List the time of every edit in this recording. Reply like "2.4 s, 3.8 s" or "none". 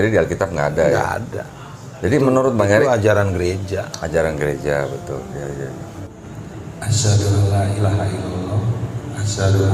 5.9 s